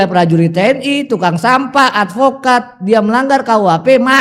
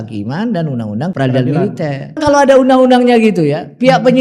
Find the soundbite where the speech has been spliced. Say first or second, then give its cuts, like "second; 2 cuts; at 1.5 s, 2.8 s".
second; 2 cuts; at 1.1 s, 2.2 s